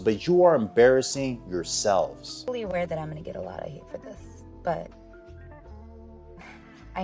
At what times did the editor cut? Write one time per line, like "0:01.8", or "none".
0:02.4